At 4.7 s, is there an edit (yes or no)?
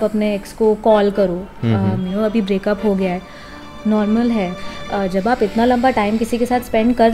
yes